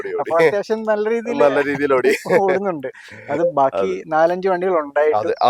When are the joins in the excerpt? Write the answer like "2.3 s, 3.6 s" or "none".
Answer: none